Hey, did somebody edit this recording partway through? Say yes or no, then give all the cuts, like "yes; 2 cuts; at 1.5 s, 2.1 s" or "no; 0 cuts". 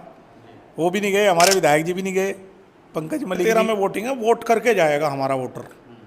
yes; 1 cut; at 3.4 s